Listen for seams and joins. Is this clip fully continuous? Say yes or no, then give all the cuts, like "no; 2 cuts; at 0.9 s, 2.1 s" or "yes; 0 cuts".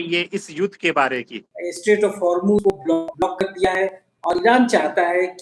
yes; 0 cuts